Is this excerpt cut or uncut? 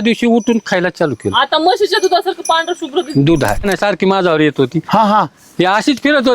cut